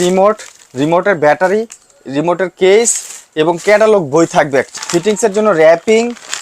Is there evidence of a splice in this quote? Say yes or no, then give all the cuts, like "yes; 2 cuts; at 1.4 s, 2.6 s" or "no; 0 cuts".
yes; 1 cut; at 4.8 s